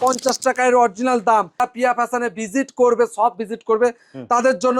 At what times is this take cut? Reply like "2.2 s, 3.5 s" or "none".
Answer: 1.6 s